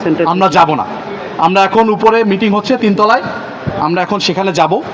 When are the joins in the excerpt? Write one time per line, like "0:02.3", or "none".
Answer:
none